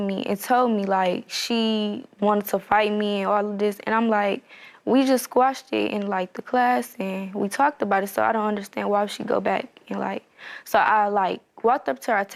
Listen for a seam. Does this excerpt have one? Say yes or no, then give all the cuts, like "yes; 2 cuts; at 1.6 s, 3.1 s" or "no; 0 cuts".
no; 0 cuts